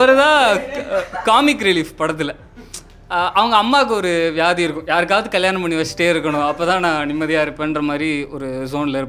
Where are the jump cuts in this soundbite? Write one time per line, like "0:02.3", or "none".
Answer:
none